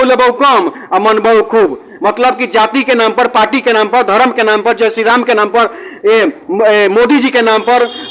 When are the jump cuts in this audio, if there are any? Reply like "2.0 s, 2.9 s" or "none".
none